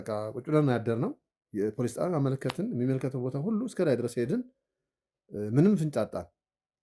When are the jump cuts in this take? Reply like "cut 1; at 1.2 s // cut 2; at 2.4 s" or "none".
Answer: none